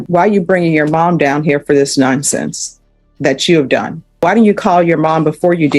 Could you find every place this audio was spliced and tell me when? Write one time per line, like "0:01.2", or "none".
0:04.0